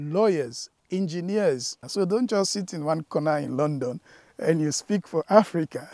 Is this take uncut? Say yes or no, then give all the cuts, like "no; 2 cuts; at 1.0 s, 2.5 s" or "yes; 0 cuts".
no; 1 cut; at 1.8 s